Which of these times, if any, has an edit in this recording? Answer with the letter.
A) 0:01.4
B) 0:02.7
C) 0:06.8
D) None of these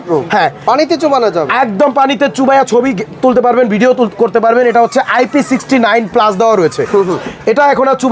D